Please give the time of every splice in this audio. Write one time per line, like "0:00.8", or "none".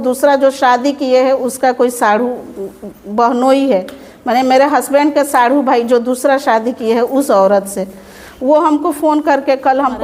none